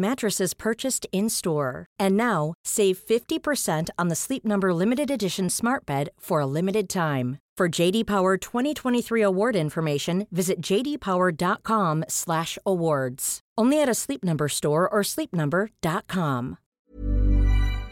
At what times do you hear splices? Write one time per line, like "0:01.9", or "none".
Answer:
0:16.9

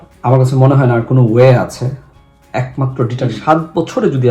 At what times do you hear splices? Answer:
0:03.4

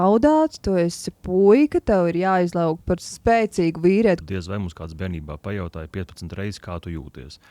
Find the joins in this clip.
0:04.2

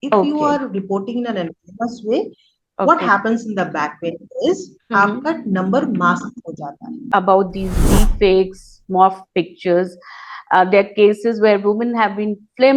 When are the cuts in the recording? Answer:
0:07.0

